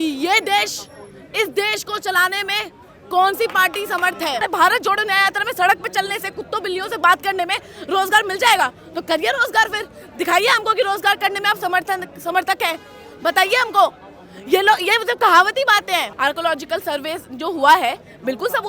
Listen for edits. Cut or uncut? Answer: cut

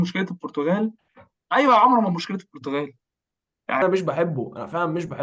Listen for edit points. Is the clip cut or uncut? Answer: cut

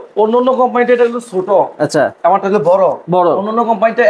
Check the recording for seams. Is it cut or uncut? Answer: uncut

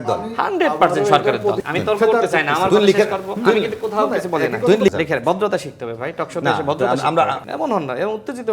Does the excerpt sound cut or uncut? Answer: cut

